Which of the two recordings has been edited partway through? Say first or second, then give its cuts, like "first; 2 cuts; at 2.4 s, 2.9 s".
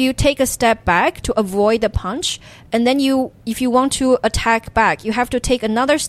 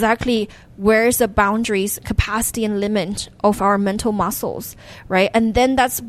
first; 1 cut; at 3.4 s